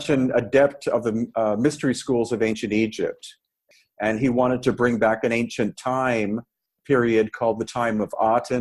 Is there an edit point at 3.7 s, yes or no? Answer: yes